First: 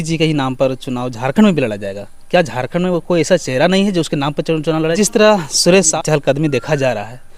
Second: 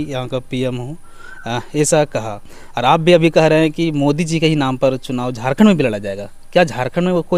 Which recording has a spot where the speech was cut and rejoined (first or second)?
first